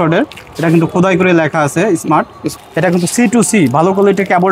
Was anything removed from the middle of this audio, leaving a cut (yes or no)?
yes